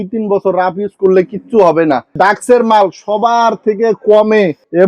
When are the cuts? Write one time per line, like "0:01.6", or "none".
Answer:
0:02.1

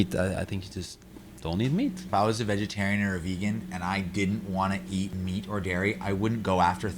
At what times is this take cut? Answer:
0:02.1
0:05.1

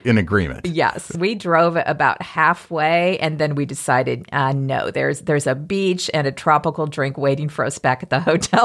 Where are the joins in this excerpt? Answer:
0:01.1

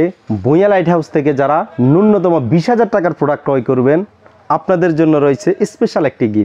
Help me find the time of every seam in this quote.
none

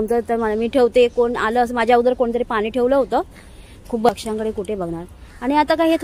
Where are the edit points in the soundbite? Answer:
0:04.1

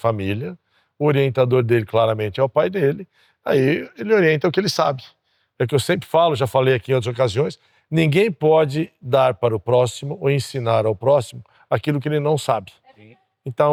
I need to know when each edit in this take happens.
none

